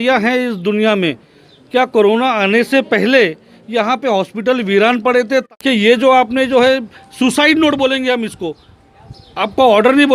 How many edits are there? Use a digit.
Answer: 1